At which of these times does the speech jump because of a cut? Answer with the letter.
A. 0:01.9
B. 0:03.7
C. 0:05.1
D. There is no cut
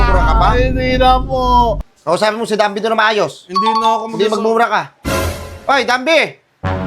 A